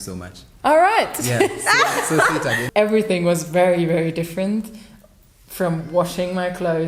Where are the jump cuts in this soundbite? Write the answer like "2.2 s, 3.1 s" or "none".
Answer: 2.6 s